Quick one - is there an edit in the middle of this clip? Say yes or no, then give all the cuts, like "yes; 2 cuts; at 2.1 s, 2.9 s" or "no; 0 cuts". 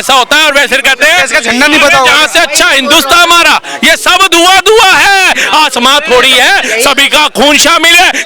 no; 0 cuts